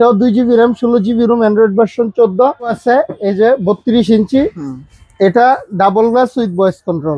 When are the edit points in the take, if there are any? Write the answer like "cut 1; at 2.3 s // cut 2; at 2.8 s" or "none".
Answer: cut 1; at 2.8 s